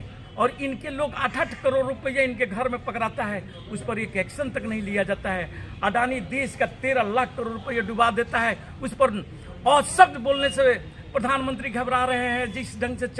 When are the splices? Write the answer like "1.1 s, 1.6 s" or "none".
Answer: none